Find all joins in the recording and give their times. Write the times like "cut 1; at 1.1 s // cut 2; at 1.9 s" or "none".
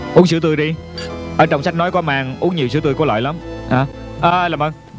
none